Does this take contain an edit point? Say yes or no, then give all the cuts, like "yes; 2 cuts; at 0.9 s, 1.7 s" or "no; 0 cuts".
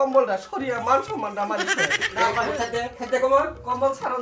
yes; 1 cut; at 2.0 s